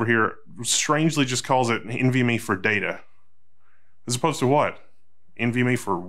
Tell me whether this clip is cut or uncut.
uncut